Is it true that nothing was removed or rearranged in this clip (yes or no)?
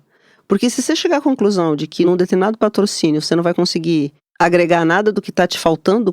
no